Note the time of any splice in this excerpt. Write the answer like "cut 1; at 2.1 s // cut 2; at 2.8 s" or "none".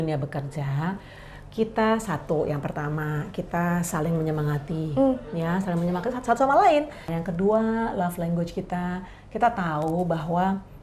cut 1; at 7.0 s

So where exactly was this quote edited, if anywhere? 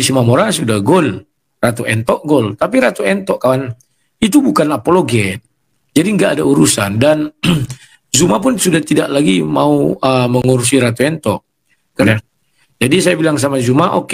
cut 1; at 12.0 s

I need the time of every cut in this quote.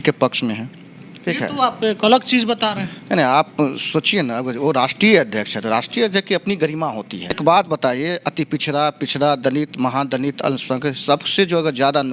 cut 1; at 7.4 s

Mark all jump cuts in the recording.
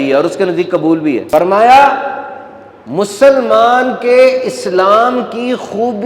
cut 1; at 1.2 s

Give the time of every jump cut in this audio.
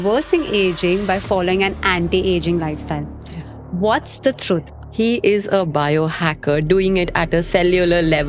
cut 1; at 4.8 s

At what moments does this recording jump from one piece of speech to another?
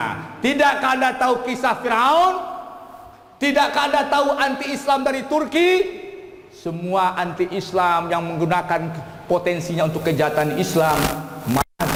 none

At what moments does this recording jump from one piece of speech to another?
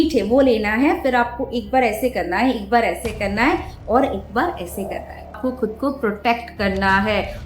cut 1; at 5.4 s

